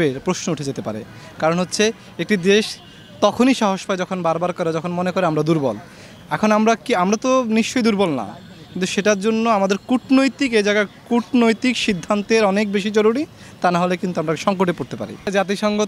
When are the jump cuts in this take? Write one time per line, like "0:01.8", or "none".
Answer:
none